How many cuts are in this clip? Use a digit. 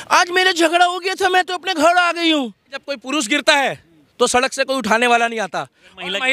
1